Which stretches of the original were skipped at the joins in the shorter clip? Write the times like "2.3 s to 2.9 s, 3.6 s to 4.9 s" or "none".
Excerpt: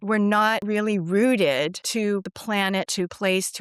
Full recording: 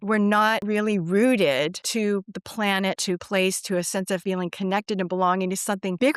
2.3 s to 2.4 s